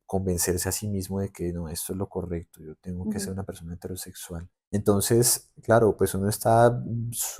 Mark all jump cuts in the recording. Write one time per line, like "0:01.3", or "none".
0:04.5